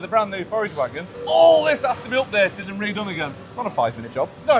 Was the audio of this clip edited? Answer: yes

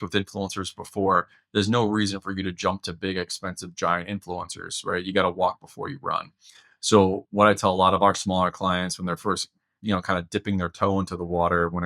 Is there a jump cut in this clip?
no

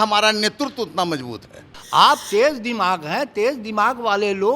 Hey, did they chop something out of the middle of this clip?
yes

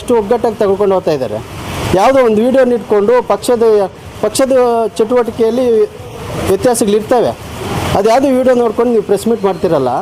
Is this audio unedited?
yes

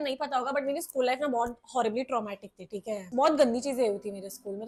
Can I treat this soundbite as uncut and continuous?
yes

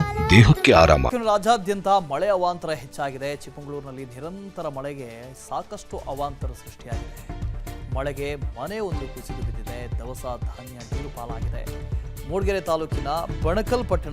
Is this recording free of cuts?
no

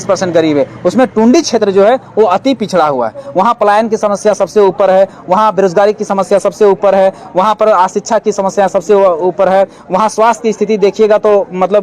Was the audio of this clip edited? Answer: no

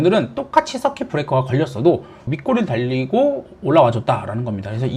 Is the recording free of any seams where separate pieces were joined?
no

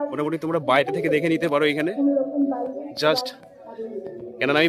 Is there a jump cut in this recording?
no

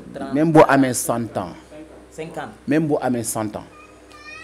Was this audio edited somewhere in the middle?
no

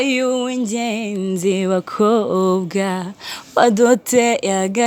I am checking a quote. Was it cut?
no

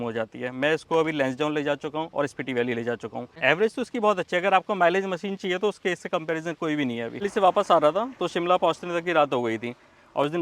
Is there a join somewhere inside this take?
yes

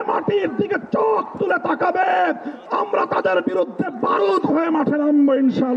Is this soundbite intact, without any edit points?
yes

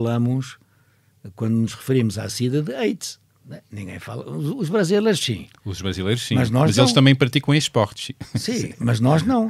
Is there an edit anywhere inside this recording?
no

